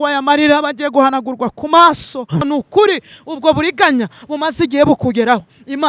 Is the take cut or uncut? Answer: cut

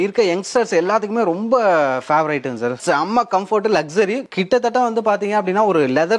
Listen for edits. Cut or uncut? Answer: cut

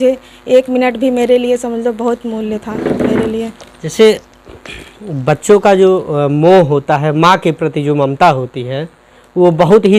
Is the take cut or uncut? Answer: uncut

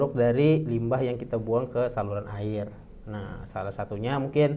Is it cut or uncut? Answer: uncut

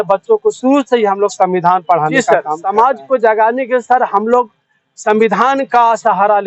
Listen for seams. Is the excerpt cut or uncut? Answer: cut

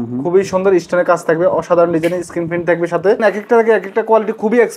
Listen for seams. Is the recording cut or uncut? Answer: cut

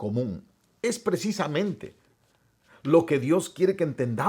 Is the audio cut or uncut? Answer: uncut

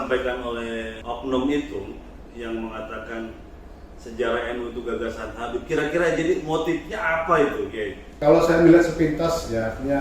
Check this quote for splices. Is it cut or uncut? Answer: cut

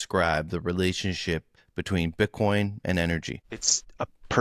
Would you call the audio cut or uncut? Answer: uncut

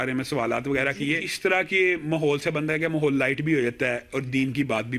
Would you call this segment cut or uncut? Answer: cut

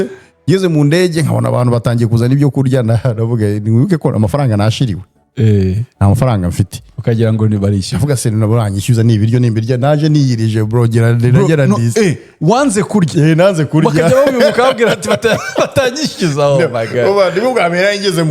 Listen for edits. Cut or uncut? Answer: uncut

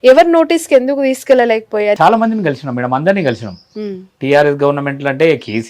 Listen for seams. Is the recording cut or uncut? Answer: cut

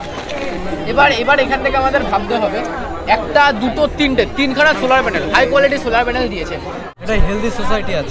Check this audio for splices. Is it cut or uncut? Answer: cut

